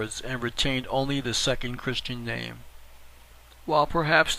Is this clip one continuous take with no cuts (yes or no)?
yes